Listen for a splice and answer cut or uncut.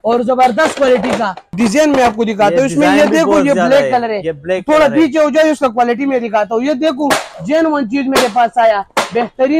cut